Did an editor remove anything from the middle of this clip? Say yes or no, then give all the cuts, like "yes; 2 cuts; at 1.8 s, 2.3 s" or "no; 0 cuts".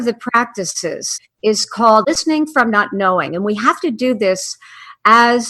yes; 2 cuts; at 1.1 s, 2.0 s